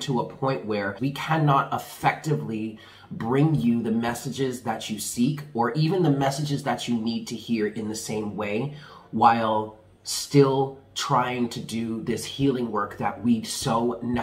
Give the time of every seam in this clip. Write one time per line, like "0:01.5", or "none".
0:00.9